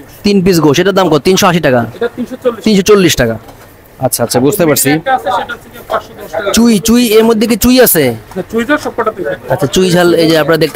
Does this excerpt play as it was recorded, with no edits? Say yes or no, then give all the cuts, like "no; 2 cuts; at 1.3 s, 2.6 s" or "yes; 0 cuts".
yes; 0 cuts